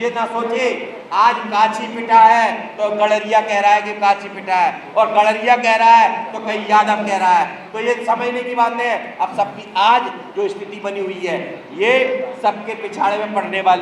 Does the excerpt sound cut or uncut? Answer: uncut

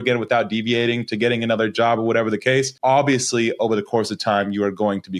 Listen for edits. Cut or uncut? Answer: cut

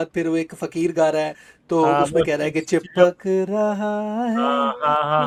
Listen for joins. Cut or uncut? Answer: uncut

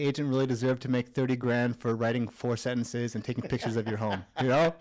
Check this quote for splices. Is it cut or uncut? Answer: uncut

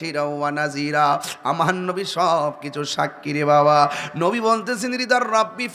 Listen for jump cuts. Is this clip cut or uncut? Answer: uncut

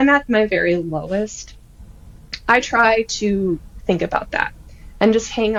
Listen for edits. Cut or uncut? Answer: uncut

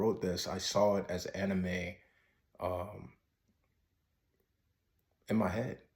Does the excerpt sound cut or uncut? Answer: uncut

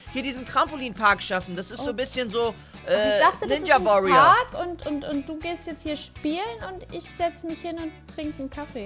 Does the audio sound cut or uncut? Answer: uncut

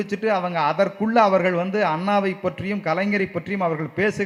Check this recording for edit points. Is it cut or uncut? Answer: uncut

